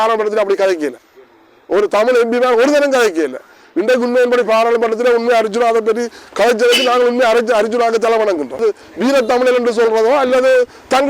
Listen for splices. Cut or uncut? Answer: cut